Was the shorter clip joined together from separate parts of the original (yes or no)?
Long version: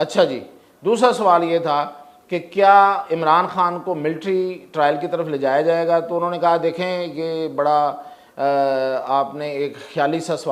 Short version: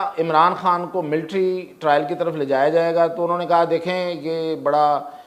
no